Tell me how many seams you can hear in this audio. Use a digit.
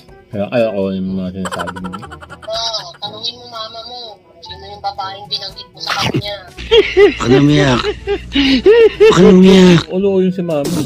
1